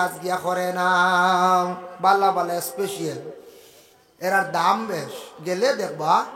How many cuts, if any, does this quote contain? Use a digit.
0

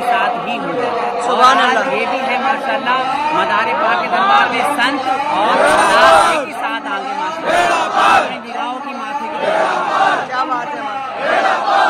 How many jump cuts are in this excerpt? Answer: 0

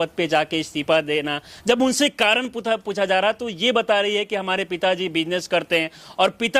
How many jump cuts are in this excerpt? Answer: 0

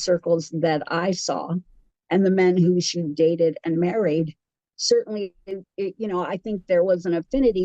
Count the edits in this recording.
1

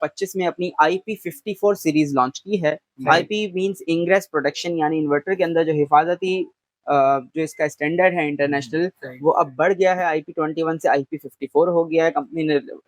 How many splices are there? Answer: 0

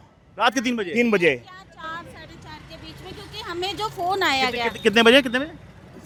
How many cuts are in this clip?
0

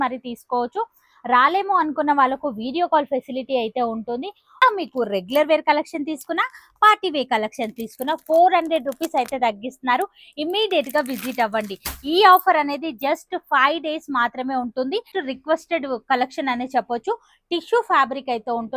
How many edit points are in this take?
2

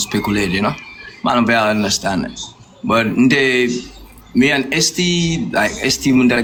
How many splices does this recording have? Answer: 0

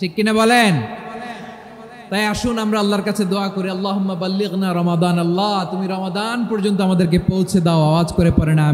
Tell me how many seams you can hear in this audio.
0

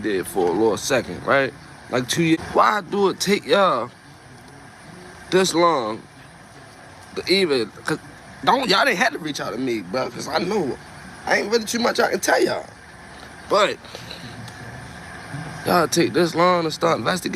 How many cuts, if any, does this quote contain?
1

